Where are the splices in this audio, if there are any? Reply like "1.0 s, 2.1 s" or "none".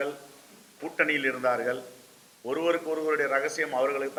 none